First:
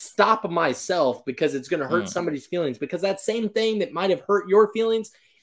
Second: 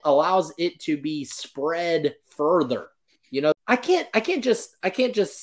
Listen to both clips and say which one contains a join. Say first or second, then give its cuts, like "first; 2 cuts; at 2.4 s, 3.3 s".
second; 1 cut; at 3.6 s